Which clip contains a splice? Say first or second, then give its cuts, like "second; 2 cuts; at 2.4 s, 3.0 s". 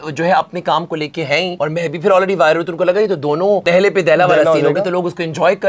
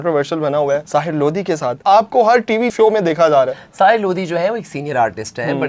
first; 2 cuts; at 1.5 s, 3.7 s